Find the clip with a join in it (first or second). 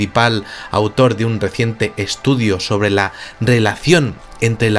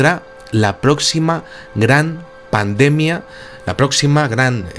second